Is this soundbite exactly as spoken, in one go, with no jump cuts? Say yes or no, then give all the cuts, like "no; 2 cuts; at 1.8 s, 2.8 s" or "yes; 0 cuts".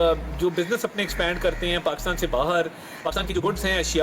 no; 1 cut; at 3.1 s